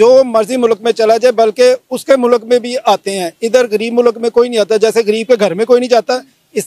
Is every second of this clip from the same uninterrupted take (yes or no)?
yes